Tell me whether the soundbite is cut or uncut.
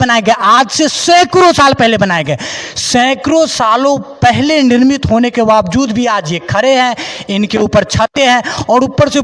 uncut